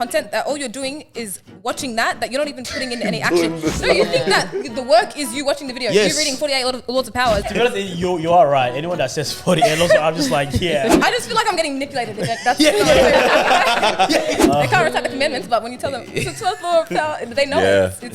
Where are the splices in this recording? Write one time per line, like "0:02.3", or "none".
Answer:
0:07.5
0:14.4